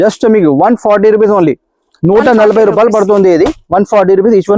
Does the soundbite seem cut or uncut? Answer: uncut